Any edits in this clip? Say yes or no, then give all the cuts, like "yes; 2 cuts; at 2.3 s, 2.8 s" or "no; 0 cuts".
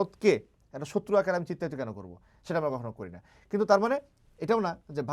no; 0 cuts